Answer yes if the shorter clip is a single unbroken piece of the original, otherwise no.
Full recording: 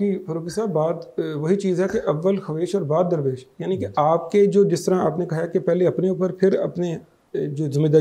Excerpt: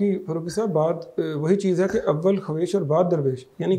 yes